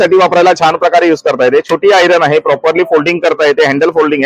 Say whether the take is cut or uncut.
uncut